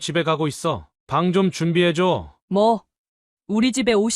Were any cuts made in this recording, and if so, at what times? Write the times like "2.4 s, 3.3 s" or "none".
2.3 s